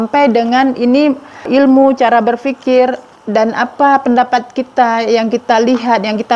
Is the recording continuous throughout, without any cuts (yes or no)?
no